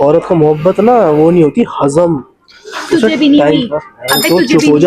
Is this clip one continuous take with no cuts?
yes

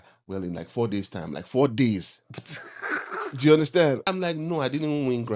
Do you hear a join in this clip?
yes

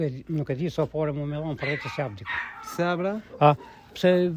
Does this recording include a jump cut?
no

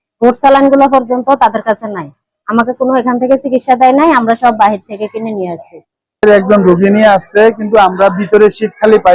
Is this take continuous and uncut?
no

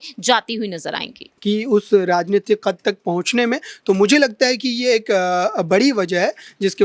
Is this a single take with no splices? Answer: no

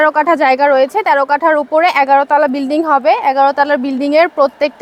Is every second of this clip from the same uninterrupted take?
yes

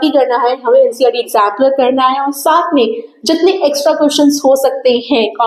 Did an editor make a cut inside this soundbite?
no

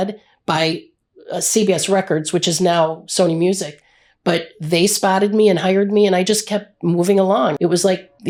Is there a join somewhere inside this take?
no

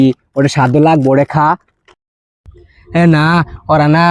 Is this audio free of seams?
no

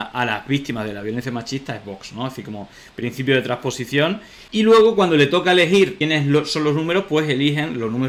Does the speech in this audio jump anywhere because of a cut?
no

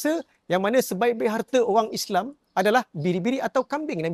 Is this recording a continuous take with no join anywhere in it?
yes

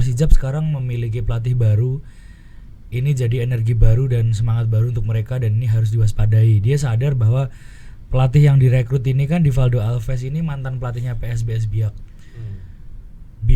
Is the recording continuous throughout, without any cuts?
yes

